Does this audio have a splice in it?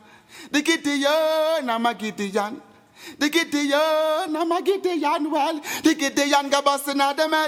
no; 0 cuts

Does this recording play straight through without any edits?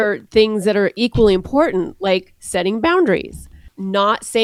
yes; 0 cuts

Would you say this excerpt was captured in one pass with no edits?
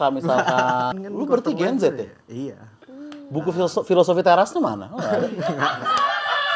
no; 1 cut; at 0.9 s

